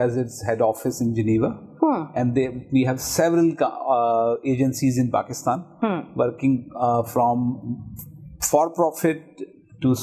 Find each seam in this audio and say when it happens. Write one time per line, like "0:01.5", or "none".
none

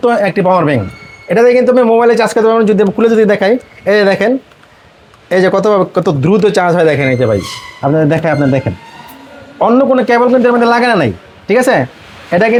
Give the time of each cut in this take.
none

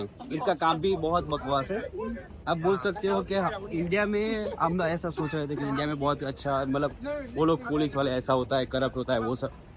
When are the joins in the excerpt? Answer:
none

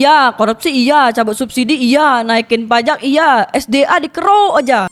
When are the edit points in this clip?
none

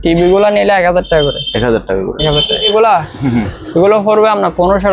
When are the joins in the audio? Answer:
0:02.7

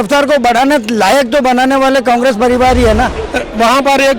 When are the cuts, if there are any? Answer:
0:03.2

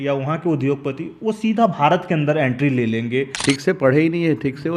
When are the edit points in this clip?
0:03.3

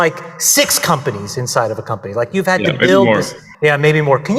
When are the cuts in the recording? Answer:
0:03.4

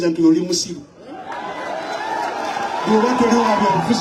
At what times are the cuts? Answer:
none

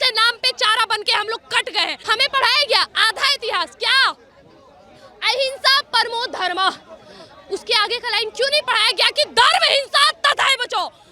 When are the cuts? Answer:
0:02.0

